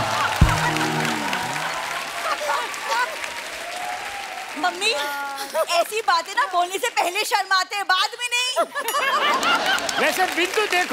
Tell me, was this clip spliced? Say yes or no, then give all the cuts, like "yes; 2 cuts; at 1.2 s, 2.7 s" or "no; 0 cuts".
no; 0 cuts